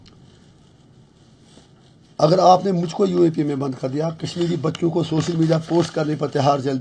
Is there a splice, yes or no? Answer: no